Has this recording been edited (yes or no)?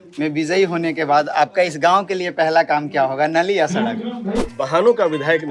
yes